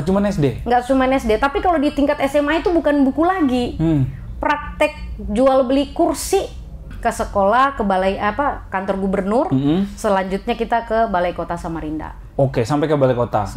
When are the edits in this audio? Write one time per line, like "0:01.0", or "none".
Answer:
0:06.9